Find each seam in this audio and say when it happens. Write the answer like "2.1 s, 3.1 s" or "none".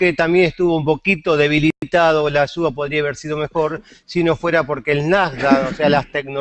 4.6 s